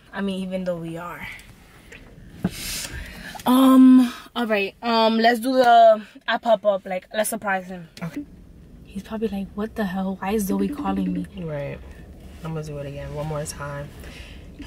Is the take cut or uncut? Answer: uncut